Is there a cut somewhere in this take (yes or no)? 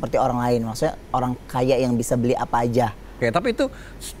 yes